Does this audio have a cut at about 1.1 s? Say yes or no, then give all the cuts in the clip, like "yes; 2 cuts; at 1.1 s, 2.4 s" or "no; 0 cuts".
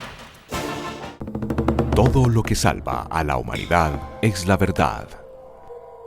yes; 1 cut; at 1.1 s